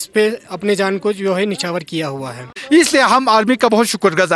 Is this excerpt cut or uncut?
cut